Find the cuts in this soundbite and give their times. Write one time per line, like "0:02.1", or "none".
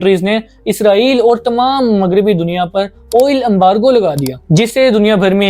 0:04.4